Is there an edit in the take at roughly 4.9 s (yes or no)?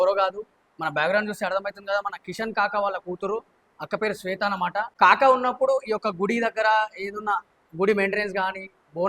yes